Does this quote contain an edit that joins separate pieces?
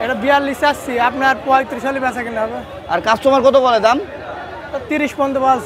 no; 0 cuts

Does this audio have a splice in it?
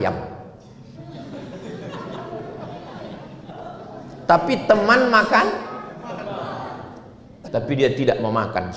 yes; 1 cut; at 7.4 s

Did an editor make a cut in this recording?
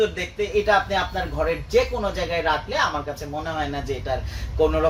no; 0 cuts

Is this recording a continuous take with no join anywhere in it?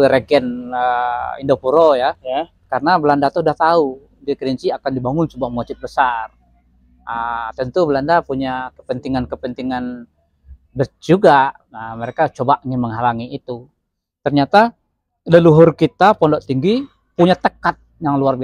yes; 0 cuts

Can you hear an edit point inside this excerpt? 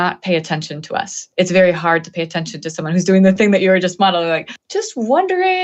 yes; 1 cut; at 4.5 s

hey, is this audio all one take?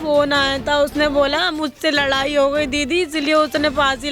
yes; 0 cuts

